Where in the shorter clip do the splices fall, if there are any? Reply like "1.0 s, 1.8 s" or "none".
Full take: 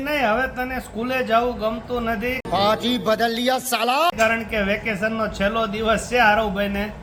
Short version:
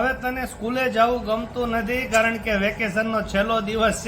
2.1 s